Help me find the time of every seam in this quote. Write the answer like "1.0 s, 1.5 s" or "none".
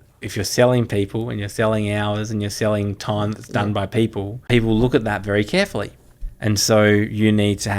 4.4 s